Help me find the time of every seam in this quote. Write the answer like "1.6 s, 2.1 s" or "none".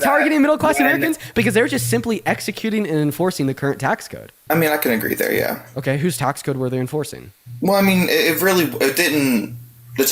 4.3 s